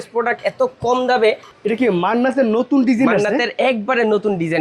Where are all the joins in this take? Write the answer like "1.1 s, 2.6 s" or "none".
1.5 s